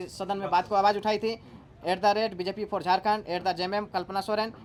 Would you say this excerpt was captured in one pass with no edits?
yes; 0 cuts

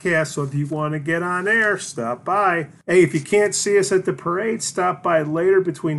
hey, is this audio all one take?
no; 1 cut; at 2.7 s

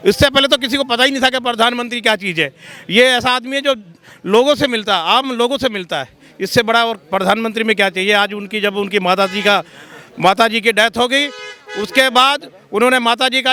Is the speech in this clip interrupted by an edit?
no; 0 cuts

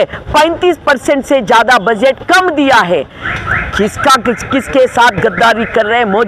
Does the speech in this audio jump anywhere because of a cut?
yes; 1 cut; at 3.2 s

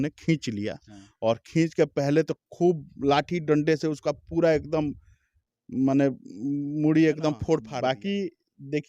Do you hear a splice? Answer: yes; 1 cut; at 7.7 s

